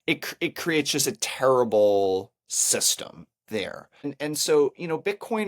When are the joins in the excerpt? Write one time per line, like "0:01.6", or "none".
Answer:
0:04.0